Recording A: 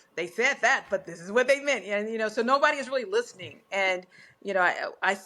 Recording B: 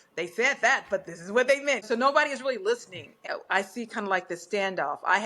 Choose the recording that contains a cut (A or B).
B